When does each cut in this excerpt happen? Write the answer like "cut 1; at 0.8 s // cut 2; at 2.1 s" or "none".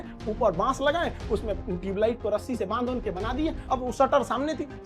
cut 1; at 3.6 s